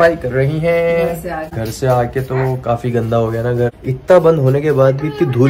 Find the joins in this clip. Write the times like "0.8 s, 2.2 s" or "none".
1.5 s, 3.8 s